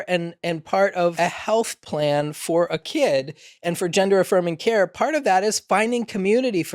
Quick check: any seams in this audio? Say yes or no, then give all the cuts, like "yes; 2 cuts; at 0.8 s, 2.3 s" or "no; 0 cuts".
yes; 2 cuts; at 1.1 s, 2.9 s